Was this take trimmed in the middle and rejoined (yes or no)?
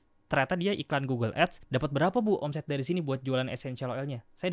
yes